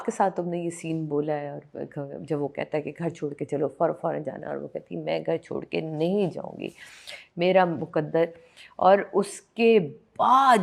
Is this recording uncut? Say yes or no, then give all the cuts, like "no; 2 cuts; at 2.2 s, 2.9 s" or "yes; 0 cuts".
yes; 0 cuts